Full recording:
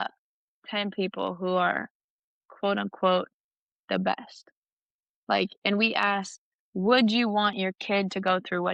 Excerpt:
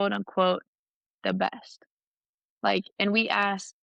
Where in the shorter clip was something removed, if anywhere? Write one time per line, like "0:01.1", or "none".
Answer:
none

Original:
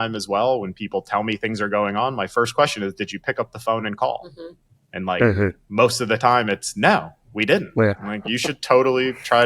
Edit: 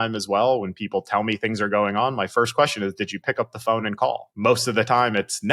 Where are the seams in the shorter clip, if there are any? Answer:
0:04.3

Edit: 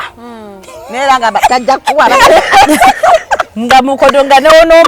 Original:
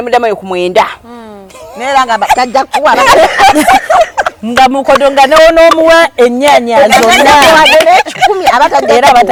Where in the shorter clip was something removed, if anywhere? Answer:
none

